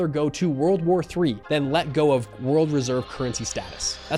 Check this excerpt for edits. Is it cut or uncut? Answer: uncut